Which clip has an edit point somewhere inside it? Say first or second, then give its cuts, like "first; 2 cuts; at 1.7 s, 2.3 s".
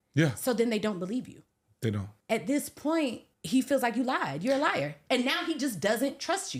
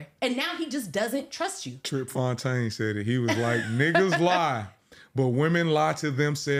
first; 2 cuts; at 2.1 s, 3.3 s